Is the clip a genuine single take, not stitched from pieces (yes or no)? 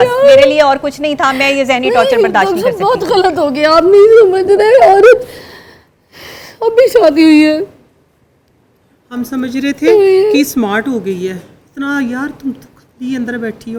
yes